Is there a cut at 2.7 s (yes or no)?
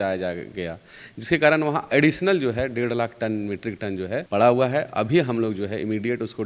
no